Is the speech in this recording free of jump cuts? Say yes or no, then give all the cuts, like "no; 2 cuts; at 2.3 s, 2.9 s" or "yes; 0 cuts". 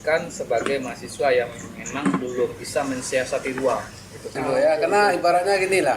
no; 1 cut; at 4.3 s